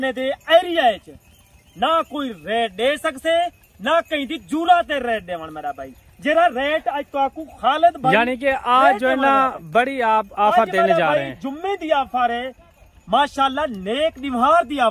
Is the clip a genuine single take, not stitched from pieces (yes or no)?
yes